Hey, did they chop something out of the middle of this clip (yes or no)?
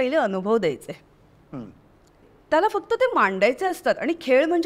yes